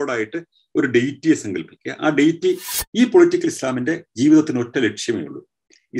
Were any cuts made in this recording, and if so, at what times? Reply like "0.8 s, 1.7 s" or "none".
2.8 s